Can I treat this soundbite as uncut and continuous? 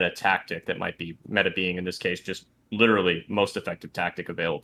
yes; 0 cuts

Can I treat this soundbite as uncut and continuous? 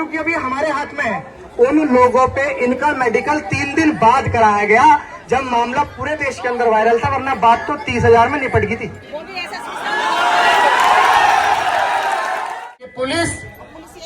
no; 2 cuts; at 1.4 s, 12.5 s

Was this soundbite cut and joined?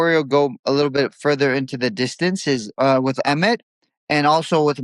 yes; 1 cut; at 2.7 s

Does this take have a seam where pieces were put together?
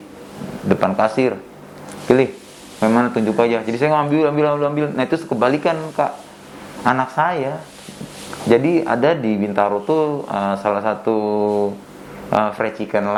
no; 0 cuts

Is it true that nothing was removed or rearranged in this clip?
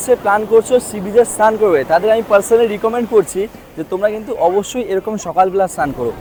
yes; 0 cuts

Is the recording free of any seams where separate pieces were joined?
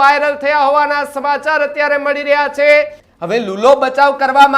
no; 1 cut; at 3.0 s

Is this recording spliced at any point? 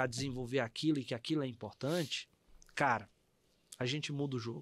no; 0 cuts

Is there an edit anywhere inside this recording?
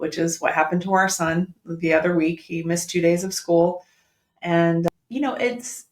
yes; 1 cut; at 4.9 s

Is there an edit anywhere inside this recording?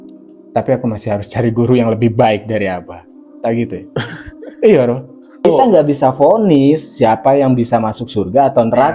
yes; 1 cut; at 5.4 s

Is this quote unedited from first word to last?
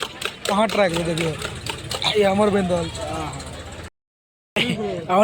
no; 1 cut; at 3.9 s

